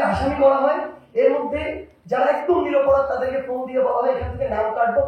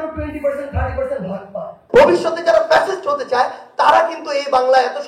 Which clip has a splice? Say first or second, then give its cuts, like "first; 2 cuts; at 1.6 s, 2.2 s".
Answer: second; 1 cut; at 1.8 s